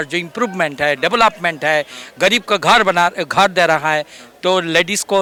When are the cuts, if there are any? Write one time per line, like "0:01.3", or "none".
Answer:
none